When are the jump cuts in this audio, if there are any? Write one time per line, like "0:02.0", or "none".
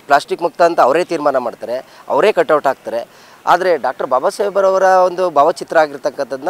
none